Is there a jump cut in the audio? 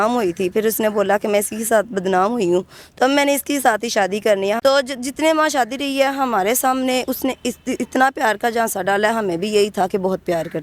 yes; 1 cut; at 4.6 s

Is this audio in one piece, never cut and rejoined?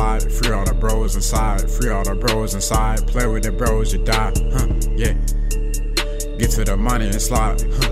yes; 0 cuts

